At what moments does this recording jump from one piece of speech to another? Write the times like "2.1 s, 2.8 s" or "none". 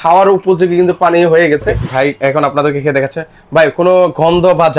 1.8 s

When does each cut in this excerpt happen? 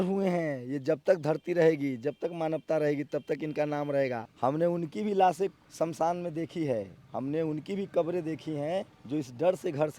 4.3 s, 5.6 s, 9.0 s

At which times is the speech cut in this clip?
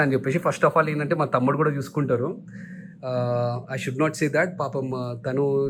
none

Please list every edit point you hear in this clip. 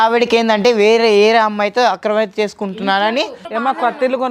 3.4 s

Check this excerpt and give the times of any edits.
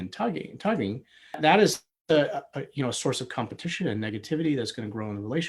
none

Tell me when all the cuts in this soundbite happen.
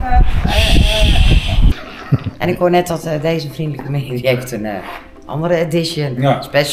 1.8 s

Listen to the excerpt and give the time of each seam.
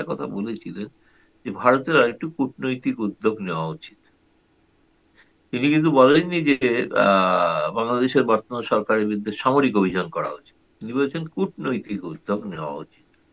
none

